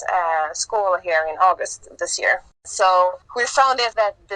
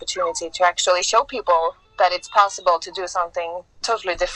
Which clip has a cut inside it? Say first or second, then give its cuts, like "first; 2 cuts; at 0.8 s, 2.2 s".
first; 2 cuts; at 2.6 s, 3.5 s